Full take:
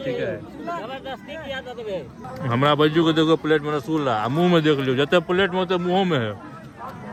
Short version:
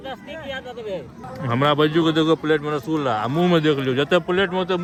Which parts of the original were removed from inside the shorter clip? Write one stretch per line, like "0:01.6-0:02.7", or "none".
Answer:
none